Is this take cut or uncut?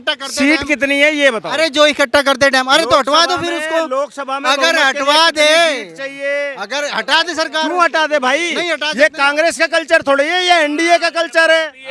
uncut